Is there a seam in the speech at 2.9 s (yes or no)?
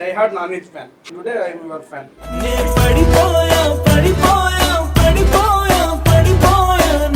no